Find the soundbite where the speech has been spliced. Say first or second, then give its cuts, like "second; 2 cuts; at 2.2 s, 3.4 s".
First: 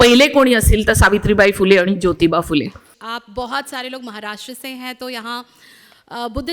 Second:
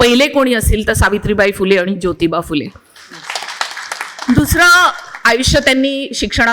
first; 1 cut; at 2.9 s